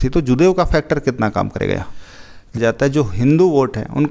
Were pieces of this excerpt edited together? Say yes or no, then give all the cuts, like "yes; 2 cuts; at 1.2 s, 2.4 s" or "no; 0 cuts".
yes; 1 cut; at 2.6 s